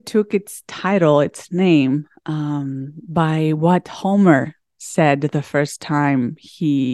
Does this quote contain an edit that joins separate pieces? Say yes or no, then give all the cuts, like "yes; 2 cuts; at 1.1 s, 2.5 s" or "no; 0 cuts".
no; 0 cuts